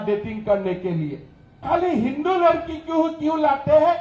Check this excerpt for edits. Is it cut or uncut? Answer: cut